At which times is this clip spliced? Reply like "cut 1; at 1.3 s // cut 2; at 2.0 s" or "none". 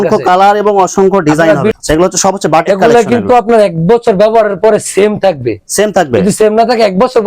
cut 1; at 1.7 s